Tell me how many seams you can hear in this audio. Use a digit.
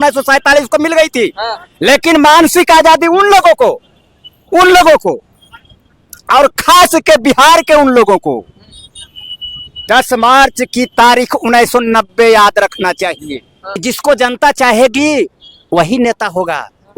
1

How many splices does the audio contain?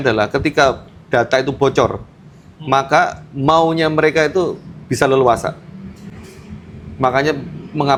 0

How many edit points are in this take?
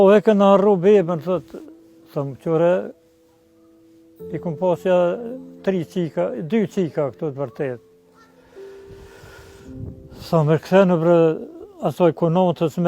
2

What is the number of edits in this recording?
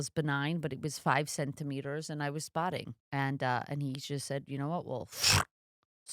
1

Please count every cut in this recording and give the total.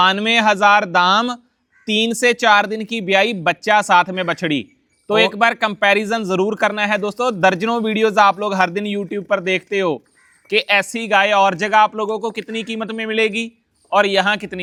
0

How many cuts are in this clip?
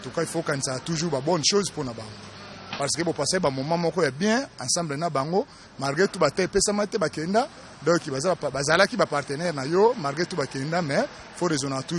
0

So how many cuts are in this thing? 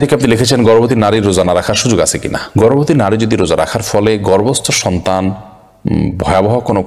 0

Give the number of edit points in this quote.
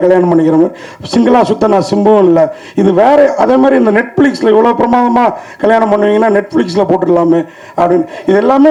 0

